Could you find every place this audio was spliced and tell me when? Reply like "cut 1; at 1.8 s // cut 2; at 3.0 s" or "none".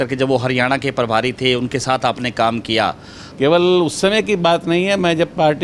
cut 1; at 3.2 s